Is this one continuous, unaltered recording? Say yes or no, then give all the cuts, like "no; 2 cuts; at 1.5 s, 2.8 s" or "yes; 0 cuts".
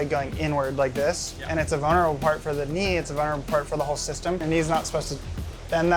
no; 1 cut; at 4.4 s